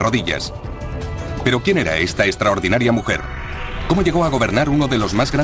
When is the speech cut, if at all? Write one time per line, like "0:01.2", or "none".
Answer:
none